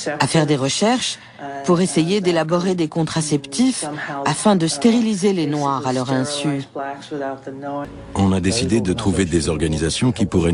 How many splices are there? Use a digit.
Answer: 1